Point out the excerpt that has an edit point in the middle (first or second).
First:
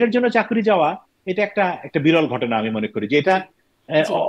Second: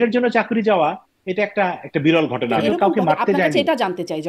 second